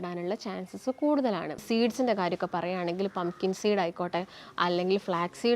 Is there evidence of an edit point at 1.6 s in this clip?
yes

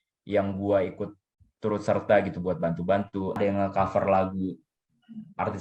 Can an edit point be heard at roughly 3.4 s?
yes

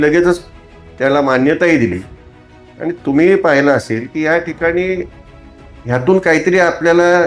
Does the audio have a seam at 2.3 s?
no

